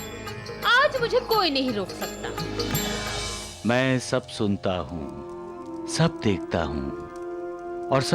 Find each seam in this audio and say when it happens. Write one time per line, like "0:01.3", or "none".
none